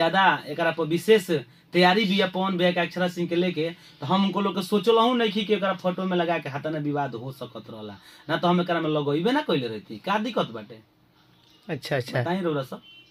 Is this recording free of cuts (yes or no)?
yes